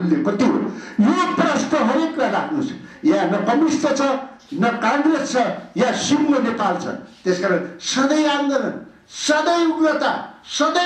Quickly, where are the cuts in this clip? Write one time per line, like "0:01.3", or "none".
none